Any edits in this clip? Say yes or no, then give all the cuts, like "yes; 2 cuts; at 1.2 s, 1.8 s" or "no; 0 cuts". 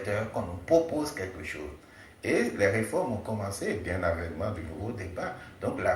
yes; 1 cut; at 5.0 s